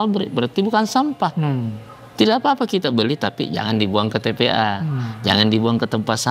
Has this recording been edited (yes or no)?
no